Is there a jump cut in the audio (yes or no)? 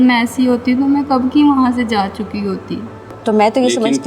yes